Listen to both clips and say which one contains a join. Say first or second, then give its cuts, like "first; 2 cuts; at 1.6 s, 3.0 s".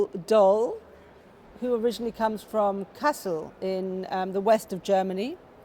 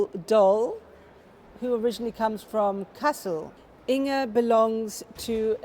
second; 1 cut; at 3.5 s